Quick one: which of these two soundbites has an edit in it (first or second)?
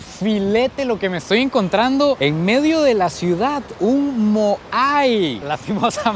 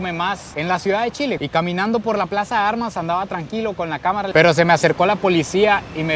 second